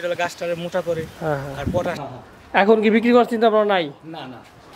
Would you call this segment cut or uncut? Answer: cut